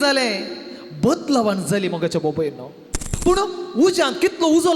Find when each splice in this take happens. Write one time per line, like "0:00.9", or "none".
0:03.1